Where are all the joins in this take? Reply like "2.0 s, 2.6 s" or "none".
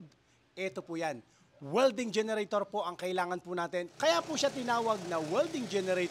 3.9 s